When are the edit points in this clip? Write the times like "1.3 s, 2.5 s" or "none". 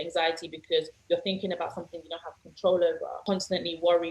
3.2 s